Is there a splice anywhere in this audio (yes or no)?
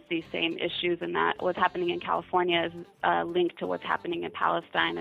yes